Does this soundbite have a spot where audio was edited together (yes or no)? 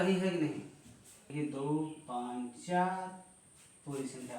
yes